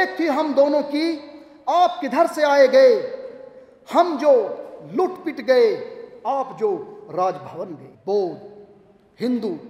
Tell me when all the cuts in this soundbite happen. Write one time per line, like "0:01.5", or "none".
0:07.9